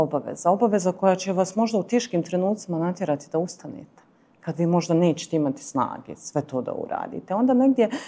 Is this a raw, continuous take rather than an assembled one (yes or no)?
yes